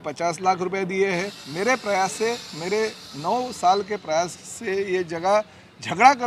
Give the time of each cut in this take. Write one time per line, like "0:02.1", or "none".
0:01.4